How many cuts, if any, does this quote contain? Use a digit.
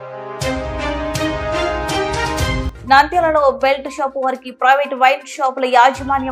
1